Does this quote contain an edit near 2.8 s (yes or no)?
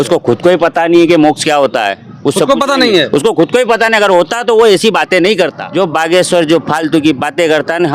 no